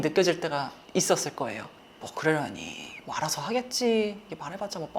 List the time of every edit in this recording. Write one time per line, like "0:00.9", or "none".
0:01.8